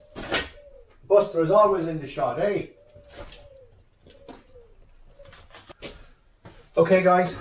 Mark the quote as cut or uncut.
cut